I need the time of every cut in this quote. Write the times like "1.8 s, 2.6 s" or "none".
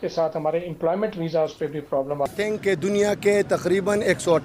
2.3 s